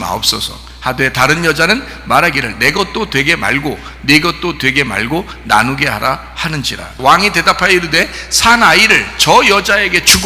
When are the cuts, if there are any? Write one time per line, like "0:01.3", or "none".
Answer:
0:06.8